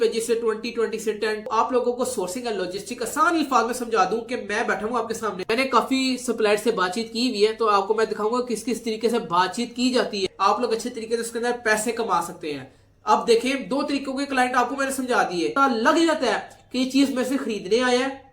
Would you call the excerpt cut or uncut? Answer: cut